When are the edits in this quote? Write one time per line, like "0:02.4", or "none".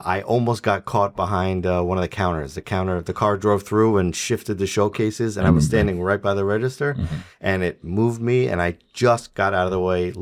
none